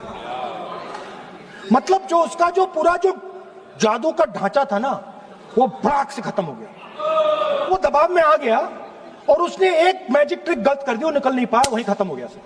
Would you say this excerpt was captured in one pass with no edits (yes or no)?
no